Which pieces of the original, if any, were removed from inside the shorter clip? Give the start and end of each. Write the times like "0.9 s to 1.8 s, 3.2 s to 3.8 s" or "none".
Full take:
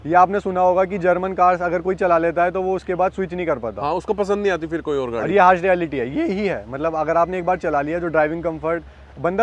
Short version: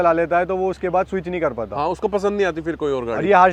none